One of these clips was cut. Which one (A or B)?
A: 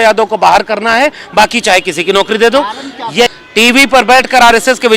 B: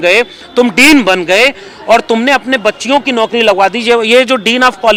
A